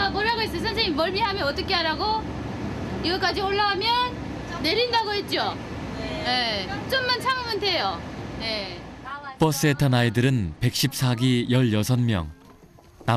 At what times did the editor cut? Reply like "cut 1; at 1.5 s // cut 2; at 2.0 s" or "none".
cut 1; at 8.6 s